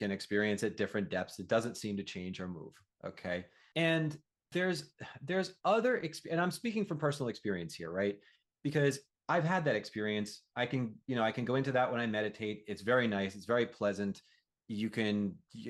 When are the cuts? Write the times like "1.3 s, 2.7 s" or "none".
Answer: 3.6 s, 4.3 s